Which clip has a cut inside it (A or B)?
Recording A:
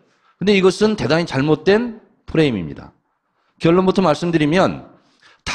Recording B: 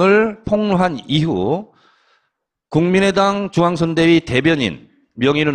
A